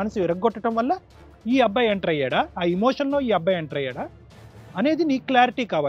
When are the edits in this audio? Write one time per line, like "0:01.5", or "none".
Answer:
none